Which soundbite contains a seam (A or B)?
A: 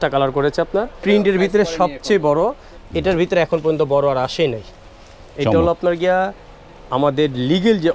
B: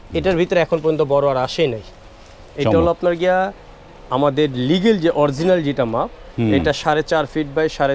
A